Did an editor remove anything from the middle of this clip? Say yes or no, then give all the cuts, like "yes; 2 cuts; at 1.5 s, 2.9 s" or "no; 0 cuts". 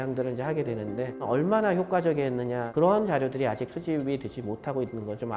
yes; 2 cuts; at 1.2 s, 2.6 s